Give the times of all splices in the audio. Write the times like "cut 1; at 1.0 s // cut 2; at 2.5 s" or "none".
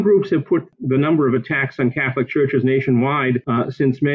none